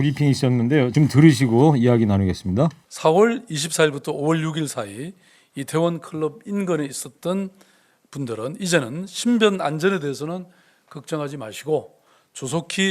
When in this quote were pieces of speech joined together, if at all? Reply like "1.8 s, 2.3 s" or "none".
0.9 s, 2.9 s